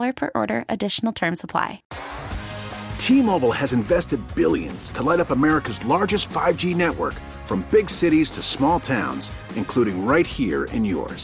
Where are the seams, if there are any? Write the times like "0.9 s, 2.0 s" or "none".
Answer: 1.8 s